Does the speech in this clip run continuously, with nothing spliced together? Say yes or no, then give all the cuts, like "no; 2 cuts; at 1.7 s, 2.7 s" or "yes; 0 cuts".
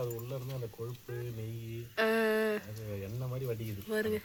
yes; 0 cuts